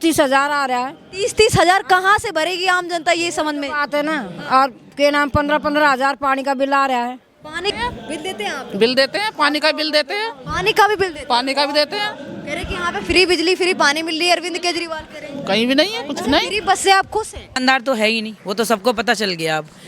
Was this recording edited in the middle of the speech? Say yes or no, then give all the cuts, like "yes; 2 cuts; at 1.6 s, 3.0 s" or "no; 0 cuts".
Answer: yes; 2 cuts; at 7.7 s, 17.6 s